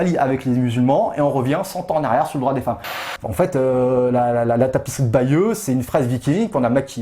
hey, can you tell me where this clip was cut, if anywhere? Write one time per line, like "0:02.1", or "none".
0:03.0